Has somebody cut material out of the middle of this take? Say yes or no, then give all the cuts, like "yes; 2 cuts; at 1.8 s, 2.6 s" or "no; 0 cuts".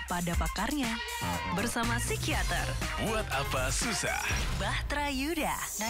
no; 0 cuts